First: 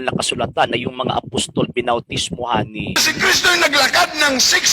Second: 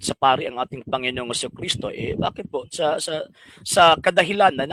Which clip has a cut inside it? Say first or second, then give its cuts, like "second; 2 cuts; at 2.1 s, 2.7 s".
first; 1 cut; at 3.0 s